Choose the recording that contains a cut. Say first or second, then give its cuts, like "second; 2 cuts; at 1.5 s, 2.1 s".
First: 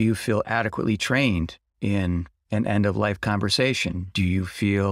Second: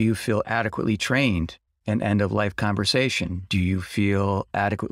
second; 1 cut; at 1.7 s